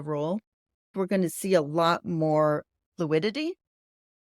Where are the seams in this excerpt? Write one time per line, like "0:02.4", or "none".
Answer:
0:00.9

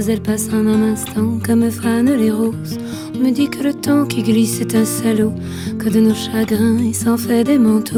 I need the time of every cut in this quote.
none

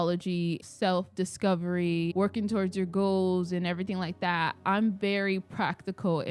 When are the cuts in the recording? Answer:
0:02.1

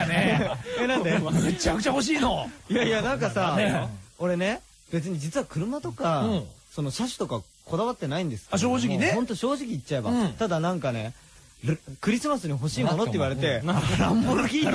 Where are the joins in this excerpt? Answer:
none

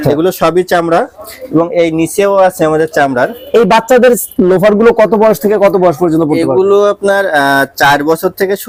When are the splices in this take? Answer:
none

